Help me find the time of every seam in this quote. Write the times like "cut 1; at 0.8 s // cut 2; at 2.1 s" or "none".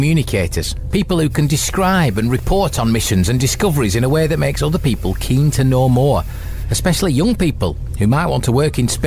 none